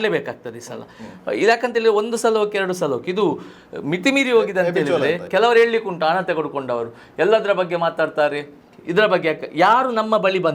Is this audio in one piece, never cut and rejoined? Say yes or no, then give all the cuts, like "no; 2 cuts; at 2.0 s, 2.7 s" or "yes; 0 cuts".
no; 1 cut; at 5.3 s